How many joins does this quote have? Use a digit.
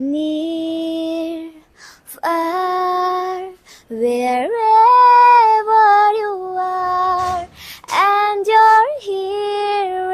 0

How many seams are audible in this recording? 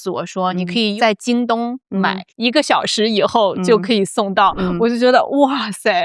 2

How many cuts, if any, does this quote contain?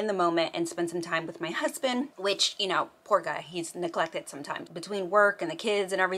1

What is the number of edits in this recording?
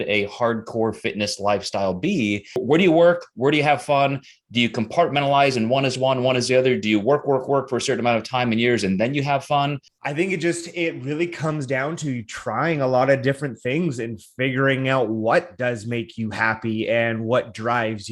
2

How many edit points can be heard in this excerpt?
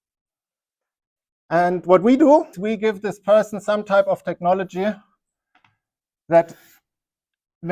1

